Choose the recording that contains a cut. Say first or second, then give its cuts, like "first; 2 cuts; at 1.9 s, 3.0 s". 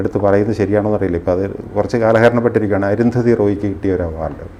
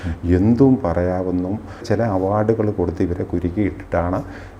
second; 1 cut; at 1.8 s